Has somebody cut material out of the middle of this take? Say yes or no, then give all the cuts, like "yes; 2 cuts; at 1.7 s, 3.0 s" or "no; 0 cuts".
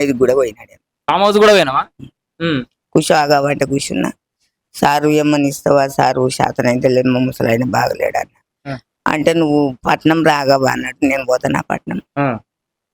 no; 0 cuts